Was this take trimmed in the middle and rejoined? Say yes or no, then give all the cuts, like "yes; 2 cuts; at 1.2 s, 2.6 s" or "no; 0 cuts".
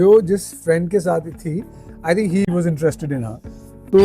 yes; 1 cut; at 2.5 s